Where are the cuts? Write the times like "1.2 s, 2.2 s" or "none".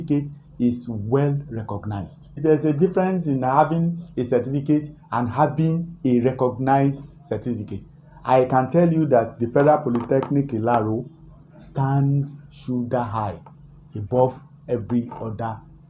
2.4 s